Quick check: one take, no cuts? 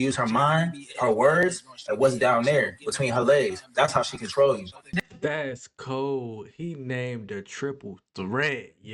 no; 1 cut; at 5.0 s

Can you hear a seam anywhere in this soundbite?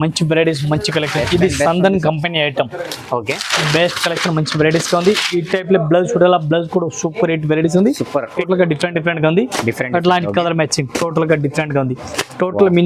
yes; 1 cut; at 8.3 s

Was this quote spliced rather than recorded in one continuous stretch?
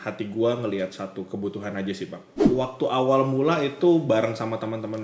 yes; 1 cut; at 2.3 s

